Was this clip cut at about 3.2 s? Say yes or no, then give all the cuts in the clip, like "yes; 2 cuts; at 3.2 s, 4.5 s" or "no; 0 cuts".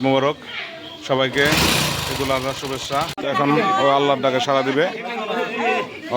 yes; 1 cut; at 3.2 s